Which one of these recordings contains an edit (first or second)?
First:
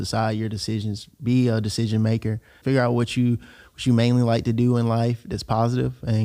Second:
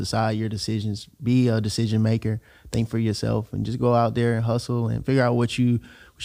first